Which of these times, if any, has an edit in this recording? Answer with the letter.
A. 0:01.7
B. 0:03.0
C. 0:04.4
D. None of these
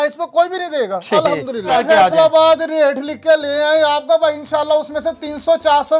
A